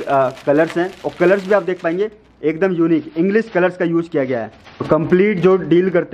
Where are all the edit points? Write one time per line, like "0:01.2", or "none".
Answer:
0:04.9